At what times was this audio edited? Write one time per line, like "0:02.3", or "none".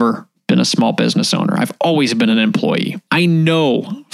0:03.0